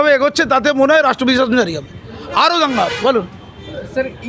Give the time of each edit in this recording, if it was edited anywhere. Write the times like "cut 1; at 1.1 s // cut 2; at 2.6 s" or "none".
none